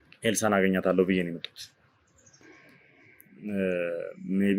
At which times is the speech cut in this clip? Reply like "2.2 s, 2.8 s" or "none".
none